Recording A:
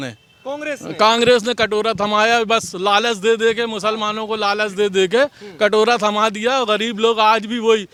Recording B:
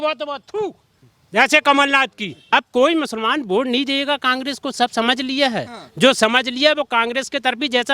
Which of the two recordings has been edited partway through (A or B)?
B